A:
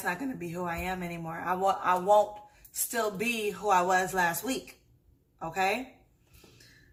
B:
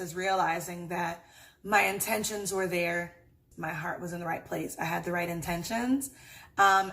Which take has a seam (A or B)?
B